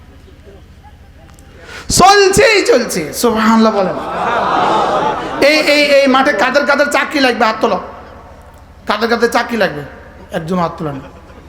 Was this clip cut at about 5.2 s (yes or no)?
yes